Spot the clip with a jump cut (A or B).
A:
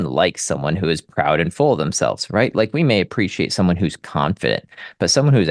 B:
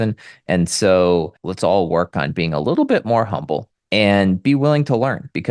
B